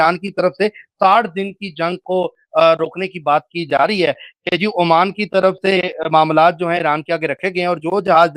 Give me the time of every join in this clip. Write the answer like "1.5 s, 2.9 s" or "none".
none